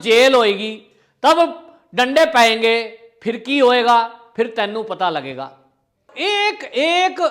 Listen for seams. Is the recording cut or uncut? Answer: cut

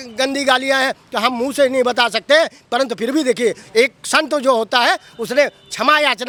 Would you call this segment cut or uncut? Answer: uncut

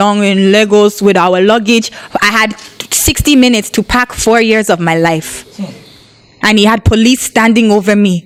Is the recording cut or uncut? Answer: uncut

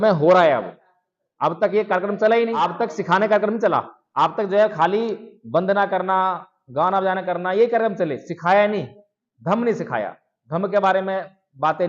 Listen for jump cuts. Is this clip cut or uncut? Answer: cut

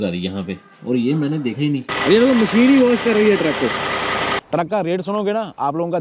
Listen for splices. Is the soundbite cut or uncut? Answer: cut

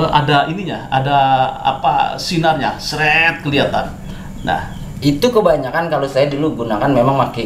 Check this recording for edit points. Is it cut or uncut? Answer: uncut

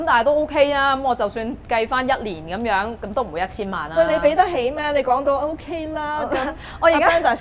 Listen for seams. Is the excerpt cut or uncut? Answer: uncut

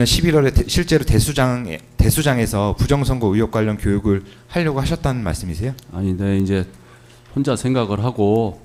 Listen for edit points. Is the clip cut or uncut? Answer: uncut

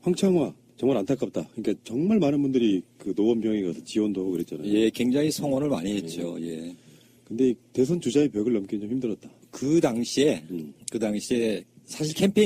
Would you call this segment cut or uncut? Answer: cut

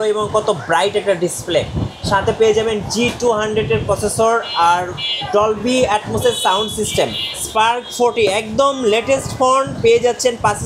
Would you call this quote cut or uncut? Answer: cut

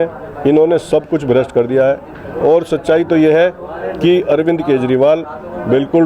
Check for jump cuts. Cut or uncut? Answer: uncut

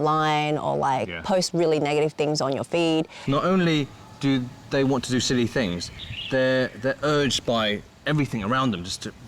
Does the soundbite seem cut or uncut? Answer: cut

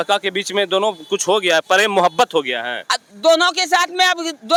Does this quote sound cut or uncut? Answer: uncut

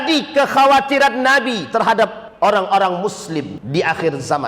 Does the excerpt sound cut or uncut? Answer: cut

